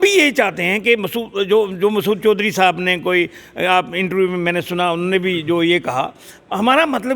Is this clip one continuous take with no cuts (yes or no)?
yes